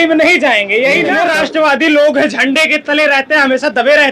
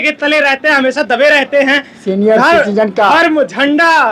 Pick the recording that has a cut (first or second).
first